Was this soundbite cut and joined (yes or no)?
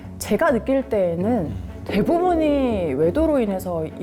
no